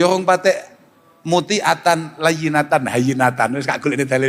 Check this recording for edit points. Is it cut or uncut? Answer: uncut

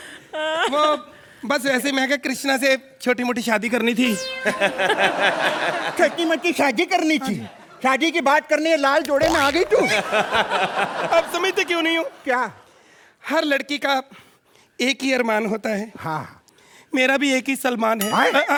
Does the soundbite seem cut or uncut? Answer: uncut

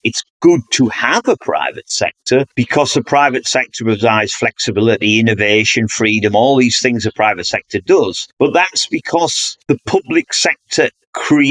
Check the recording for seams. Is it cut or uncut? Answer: uncut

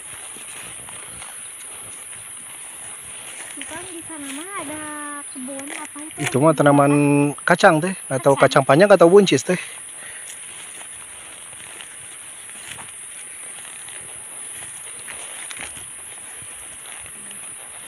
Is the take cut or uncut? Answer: uncut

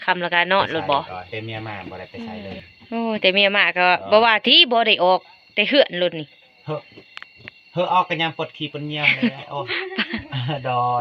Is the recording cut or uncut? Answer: cut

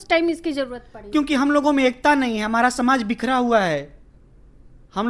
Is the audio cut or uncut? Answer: uncut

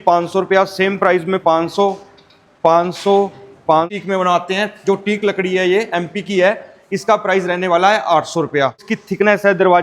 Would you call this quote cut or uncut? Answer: cut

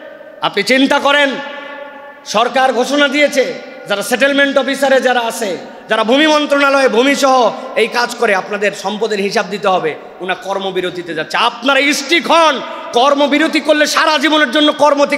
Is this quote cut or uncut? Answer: uncut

